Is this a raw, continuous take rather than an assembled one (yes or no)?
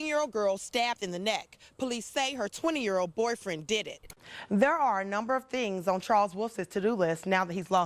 no